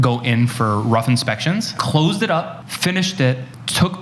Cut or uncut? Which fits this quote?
cut